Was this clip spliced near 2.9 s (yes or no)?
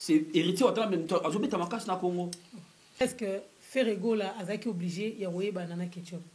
yes